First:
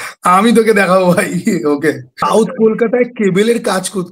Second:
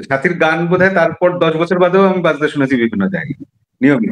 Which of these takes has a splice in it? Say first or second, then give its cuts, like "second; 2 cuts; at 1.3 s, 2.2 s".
first; 1 cut; at 2.2 s